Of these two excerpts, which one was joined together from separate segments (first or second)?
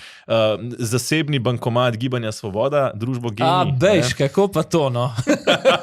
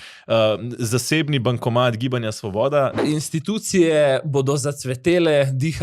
second